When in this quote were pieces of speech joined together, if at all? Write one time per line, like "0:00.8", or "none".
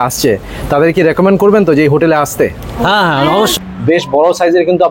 0:03.5